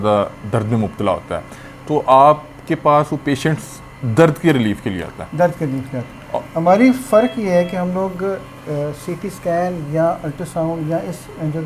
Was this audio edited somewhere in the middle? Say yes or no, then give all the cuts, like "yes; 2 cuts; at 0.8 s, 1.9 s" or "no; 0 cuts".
no; 0 cuts